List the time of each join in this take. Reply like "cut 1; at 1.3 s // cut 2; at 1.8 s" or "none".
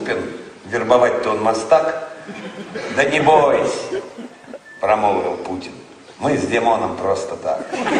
cut 1; at 2.0 s